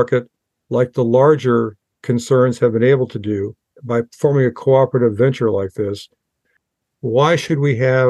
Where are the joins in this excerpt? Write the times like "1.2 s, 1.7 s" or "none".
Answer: 3.7 s, 6.5 s